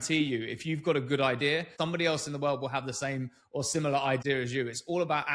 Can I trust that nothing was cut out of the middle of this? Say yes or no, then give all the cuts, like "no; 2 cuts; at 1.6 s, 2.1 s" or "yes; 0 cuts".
no; 2 cuts; at 1.7 s, 4.2 s